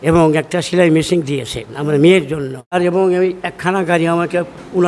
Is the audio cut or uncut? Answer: cut